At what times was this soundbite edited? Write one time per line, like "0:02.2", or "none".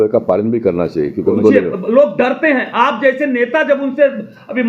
0:01.4